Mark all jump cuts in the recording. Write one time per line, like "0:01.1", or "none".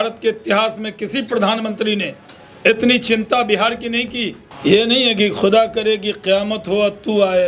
0:04.4

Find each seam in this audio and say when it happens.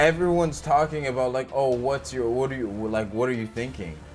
none

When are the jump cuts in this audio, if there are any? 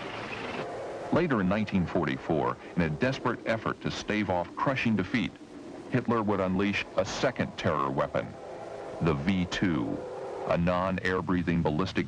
0:02.4

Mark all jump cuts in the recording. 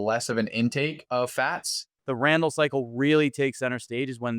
0:01.0
0:01.9

